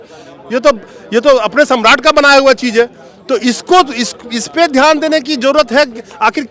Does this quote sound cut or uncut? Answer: uncut